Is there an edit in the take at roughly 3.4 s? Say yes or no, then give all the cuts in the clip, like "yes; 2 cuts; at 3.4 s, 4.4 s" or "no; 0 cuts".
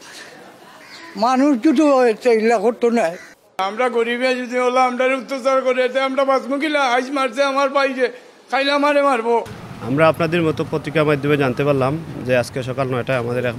no; 0 cuts